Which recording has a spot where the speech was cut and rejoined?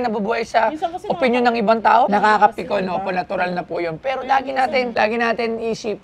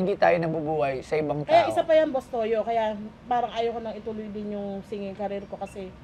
first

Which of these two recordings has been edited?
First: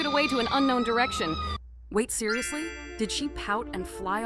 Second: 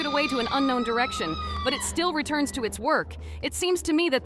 first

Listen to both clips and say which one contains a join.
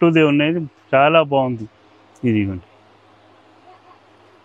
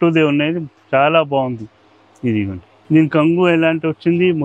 second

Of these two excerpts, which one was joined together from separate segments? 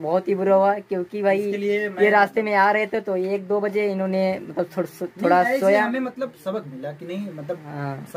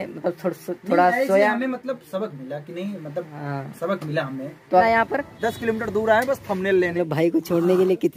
second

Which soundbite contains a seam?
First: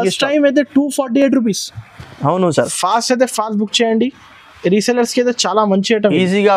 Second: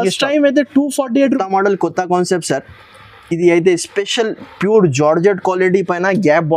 second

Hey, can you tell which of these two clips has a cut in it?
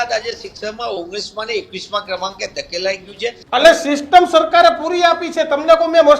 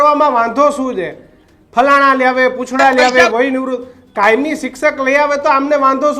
first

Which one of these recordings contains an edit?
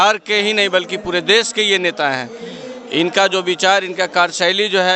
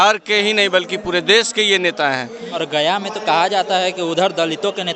second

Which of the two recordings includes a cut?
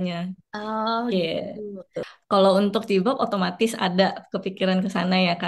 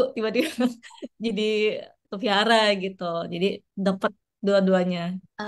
first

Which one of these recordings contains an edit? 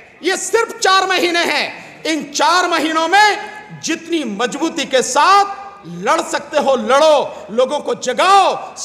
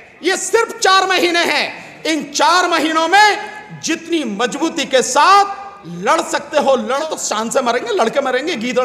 second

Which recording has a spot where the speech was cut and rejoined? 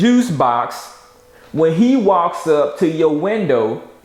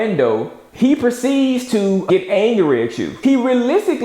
second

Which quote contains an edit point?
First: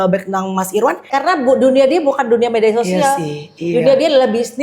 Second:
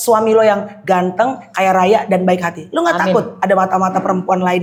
first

